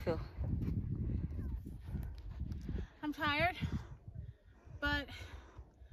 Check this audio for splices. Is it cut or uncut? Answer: uncut